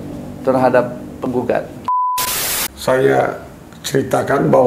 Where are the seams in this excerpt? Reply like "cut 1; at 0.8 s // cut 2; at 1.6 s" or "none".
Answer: cut 1; at 2.2 s